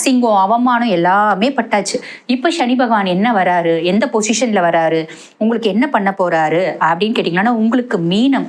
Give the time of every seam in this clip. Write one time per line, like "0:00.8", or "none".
none